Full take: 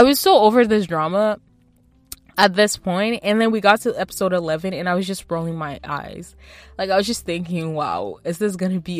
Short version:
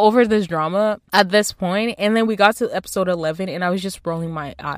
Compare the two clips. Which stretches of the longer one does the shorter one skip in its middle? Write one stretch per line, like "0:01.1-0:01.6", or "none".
0:01.4-0:02.3